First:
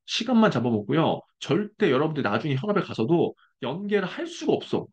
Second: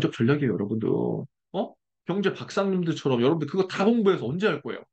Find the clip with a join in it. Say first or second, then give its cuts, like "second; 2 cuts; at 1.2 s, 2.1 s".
second; 1 cut; at 1.4 s